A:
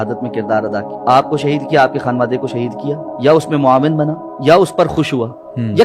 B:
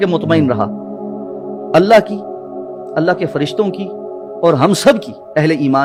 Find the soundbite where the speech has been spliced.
A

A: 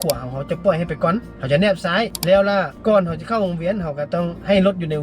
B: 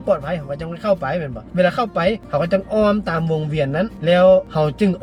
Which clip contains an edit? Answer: A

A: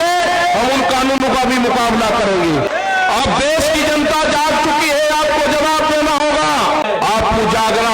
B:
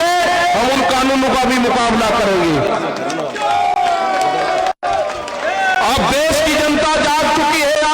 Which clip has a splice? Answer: A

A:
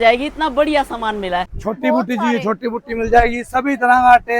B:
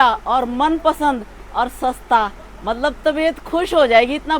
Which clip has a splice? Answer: A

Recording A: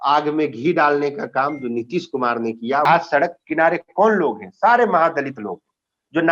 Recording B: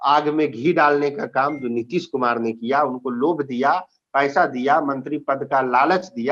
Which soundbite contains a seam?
A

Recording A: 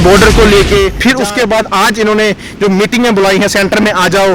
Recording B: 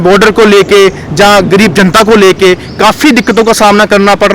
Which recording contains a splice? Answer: A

